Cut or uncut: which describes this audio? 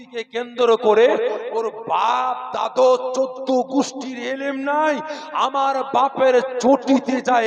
uncut